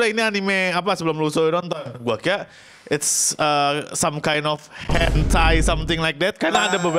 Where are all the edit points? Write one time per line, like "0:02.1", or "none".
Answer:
none